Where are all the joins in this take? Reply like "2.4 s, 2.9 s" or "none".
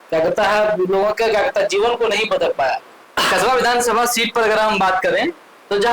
3.1 s

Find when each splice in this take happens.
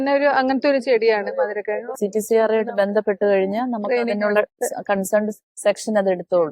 1.9 s, 5.3 s

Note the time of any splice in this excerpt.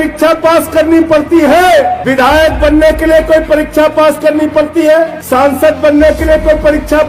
2.0 s, 5.2 s

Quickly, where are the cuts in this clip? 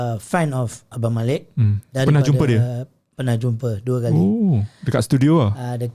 none

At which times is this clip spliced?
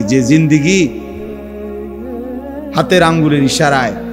1.0 s, 2.4 s

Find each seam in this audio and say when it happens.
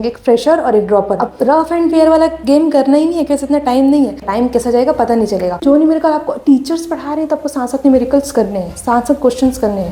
1.3 s, 4.2 s, 5.6 s

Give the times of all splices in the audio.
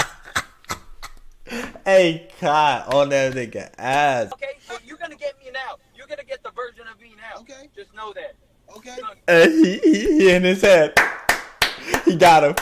4.3 s

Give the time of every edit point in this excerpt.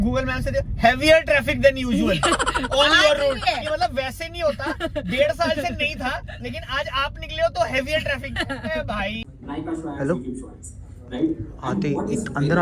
9.3 s

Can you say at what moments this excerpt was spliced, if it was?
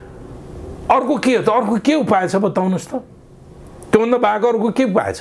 none

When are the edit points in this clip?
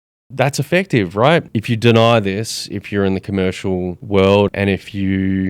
1.5 s, 4.0 s, 4.5 s

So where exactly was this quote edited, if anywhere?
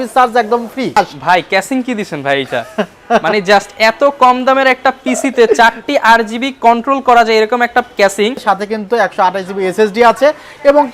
1.0 s, 8.4 s

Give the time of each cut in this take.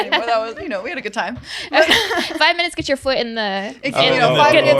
none

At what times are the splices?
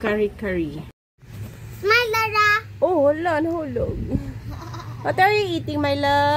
1.0 s

